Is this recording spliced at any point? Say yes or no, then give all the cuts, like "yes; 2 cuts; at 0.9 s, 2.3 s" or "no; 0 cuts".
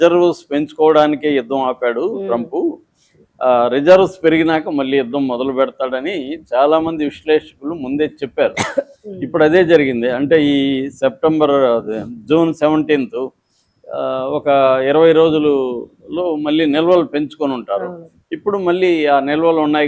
no; 0 cuts